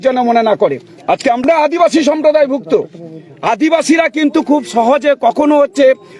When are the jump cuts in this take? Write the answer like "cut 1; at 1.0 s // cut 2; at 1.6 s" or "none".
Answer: cut 1; at 1.4 s